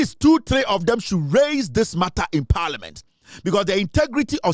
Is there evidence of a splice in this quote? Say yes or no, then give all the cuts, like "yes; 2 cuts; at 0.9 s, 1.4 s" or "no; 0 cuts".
no; 0 cuts